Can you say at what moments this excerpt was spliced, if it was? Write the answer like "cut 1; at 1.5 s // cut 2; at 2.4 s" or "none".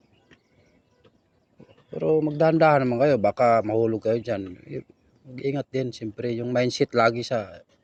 none